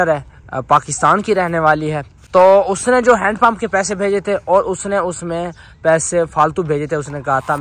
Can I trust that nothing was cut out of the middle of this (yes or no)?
no